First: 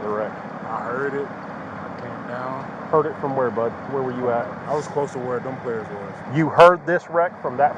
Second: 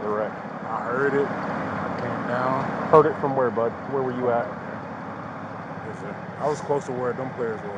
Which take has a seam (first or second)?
first